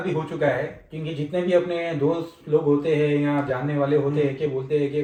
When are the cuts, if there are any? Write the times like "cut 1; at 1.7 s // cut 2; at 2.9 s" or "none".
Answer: none